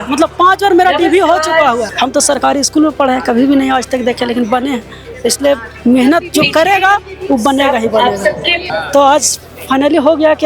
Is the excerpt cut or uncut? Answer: cut